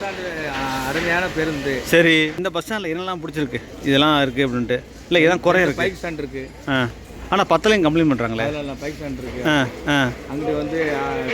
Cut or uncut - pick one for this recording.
cut